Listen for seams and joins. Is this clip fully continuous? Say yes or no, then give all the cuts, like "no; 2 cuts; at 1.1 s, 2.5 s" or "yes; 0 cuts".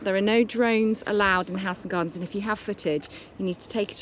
yes; 0 cuts